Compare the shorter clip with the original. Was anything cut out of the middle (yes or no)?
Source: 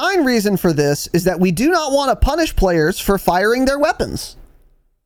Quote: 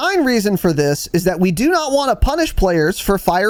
no